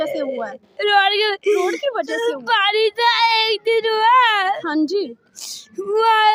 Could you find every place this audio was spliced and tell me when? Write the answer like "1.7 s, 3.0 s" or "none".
none